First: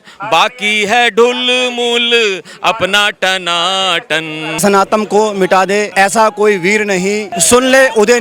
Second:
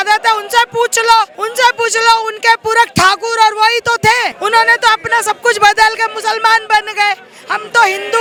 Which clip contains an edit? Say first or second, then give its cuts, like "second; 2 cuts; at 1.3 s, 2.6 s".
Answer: first; 3 cuts; at 4.5 s, 5.9 s, 7.3 s